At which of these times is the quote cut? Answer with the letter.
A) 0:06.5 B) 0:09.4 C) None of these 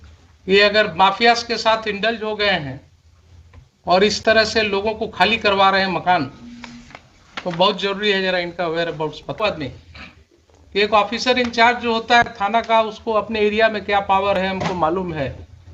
B